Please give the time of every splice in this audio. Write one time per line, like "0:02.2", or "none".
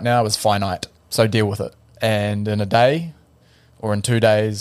0:01.0
0:01.8